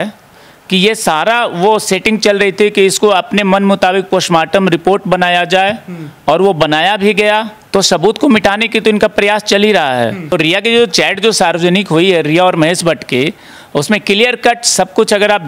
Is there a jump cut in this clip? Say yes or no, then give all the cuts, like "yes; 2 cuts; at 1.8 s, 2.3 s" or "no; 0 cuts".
yes; 2 cuts; at 7.6 s, 10.3 s